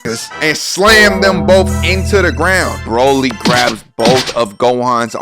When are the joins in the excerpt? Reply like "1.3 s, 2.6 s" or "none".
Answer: 2.8 s